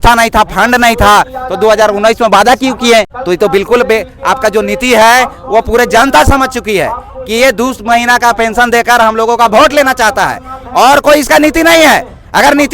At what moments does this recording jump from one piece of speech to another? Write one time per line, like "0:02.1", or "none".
0:03.2